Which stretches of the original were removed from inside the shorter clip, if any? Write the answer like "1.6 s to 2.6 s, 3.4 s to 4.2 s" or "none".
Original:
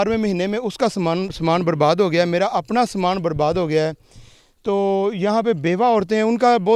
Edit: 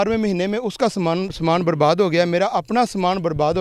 none

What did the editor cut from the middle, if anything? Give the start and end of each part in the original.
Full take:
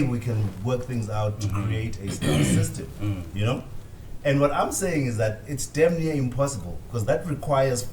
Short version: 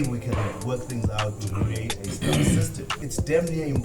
3.0 s to 5.4 s

